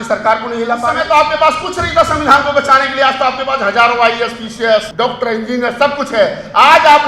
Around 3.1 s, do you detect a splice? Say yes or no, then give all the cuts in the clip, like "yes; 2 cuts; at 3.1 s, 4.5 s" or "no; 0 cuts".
no; 2 cuts; at 1.0 s, 4.9 s